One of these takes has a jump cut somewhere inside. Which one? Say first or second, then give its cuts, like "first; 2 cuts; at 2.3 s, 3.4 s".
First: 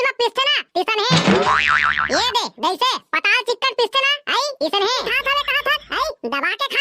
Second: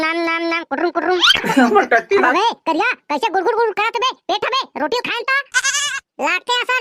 first; 1 cut; at 5.1 s